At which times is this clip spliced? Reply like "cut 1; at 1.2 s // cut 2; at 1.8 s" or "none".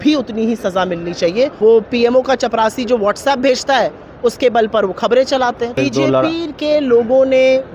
cut 1; at 1.5 s // cut 2; at 5.7 s